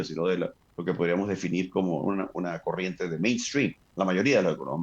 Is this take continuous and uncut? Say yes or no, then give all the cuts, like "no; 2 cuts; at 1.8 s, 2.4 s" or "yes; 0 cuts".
yes; 0 cuts